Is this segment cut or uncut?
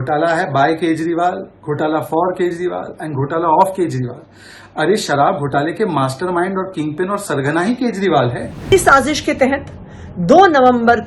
cut